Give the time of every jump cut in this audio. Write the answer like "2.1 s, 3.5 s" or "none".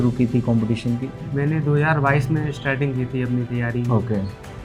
none